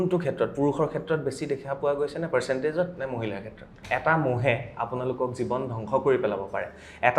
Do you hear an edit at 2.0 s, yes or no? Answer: no